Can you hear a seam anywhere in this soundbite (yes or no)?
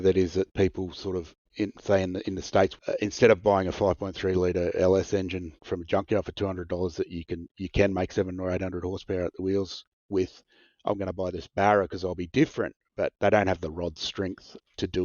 yes